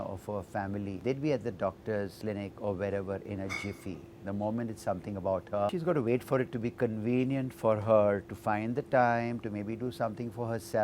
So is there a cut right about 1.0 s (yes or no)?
yes